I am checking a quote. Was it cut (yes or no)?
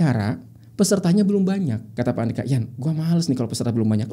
yes